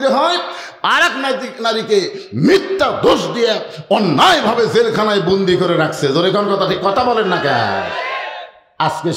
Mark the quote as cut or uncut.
uncut